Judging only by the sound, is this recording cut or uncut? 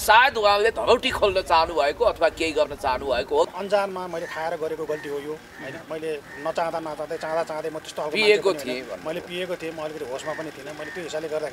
cut